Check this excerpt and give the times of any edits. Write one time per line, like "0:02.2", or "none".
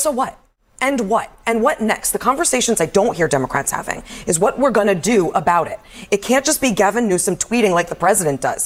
none